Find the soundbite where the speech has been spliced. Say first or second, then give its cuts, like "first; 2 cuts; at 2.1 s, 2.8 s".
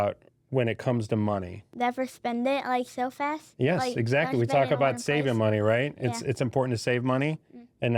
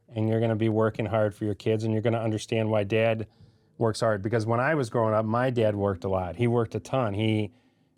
first; 1 cut; at 1.6 s